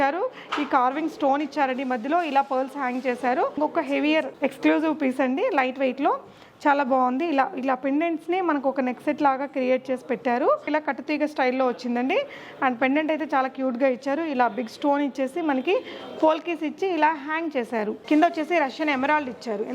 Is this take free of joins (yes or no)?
no